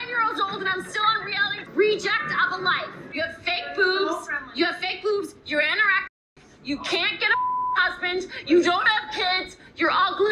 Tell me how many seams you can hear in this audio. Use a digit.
2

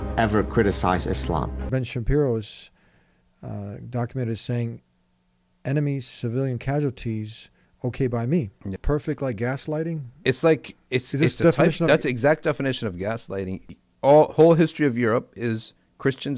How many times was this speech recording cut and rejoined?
3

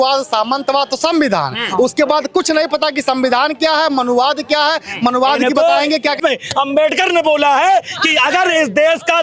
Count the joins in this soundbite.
1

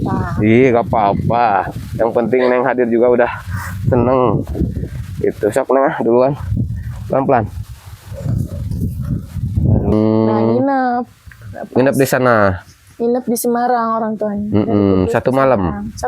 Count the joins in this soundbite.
1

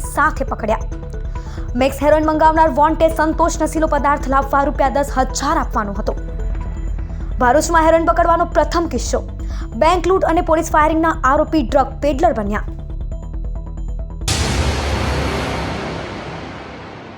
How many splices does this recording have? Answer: 1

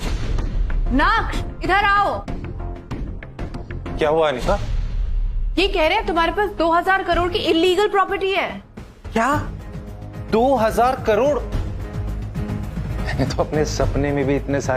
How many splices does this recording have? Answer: 1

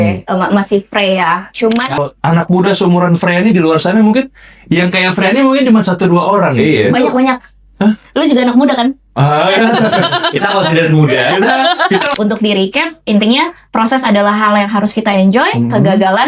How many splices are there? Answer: 2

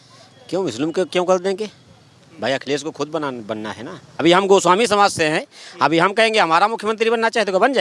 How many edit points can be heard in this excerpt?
1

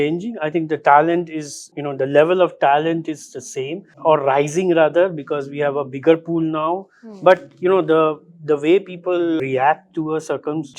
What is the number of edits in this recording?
0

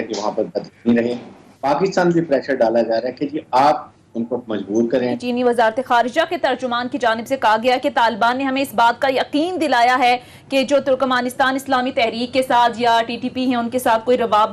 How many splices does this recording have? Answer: 2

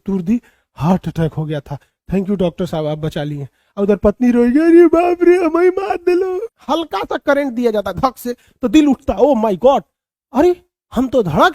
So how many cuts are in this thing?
1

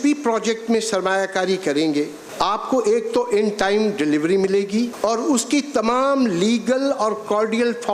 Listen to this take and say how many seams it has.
2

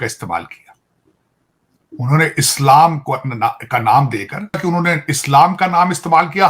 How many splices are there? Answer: 1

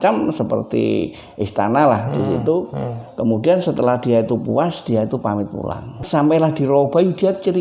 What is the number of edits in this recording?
1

